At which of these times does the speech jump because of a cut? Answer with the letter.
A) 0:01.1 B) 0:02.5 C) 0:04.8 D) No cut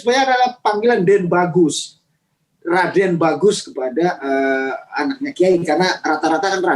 B